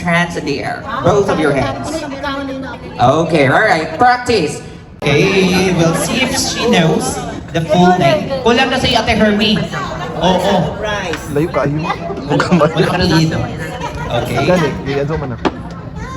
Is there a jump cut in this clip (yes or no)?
yes